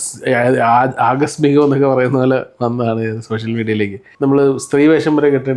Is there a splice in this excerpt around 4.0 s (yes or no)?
yes